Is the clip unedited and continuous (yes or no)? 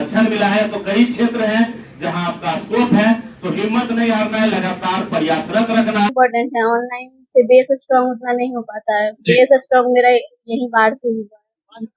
no